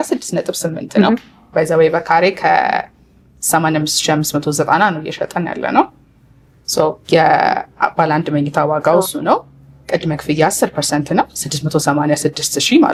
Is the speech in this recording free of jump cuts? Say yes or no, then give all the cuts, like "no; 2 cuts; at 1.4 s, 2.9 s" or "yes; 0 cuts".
yes; 0 cuts